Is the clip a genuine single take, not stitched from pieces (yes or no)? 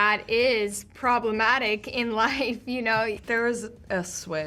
no